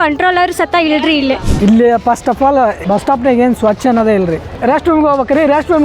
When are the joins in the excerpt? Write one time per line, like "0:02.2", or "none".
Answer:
0:01.5
0:02.8
0:04.5